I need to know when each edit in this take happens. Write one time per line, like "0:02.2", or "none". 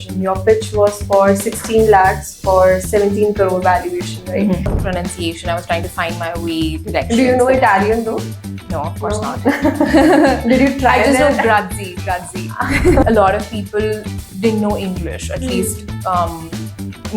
0:04.8
0:13.0